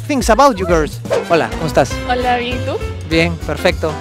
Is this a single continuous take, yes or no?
no